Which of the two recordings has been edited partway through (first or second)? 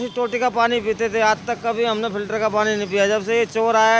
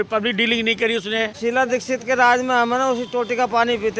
second